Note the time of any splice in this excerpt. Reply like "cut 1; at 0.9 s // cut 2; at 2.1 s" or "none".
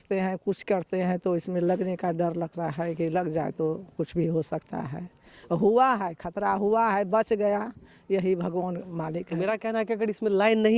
cut 1; at 9.3 s